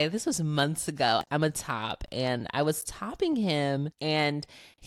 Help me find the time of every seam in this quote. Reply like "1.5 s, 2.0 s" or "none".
1.2 s, 3.9 s